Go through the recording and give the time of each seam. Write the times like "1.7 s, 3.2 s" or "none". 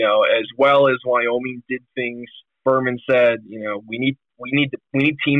2.6 s